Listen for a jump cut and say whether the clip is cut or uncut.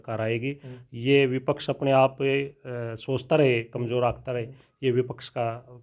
uncut